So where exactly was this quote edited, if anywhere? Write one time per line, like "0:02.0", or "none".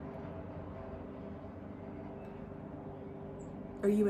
none